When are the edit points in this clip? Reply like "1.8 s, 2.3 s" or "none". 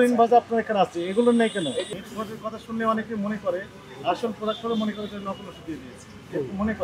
1.9 s